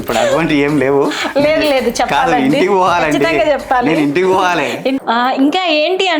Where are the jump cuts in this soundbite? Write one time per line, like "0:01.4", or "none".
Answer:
0:05.0